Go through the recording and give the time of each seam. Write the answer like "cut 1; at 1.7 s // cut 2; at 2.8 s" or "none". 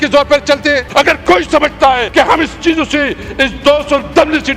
cut 1; at 0.9 s // cut 2; at 2.0 s